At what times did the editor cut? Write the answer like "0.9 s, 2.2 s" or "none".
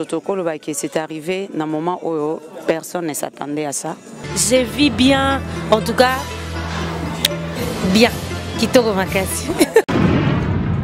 4.3 s